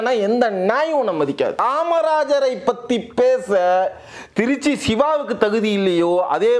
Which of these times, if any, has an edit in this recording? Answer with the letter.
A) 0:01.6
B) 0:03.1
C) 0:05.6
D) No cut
A